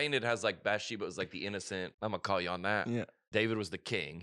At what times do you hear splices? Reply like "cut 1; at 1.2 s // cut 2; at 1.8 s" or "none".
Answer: cut 1; at 1.9 s // cut 2; at 3.2 s

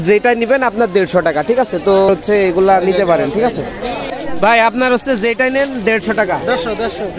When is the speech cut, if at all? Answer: cut 1; at 2.1 s // cut 2; at 4.2 s

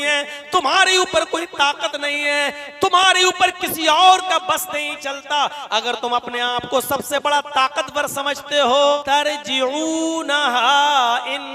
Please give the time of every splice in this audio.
cut 1; at 9.0 s

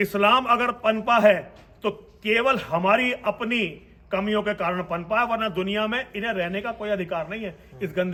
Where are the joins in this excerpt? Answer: none

